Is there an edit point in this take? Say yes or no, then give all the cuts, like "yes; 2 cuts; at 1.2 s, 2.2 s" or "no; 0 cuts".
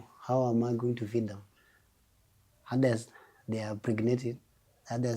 no; 0 cuts